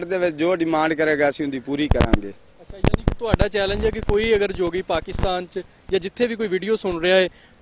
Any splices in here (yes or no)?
no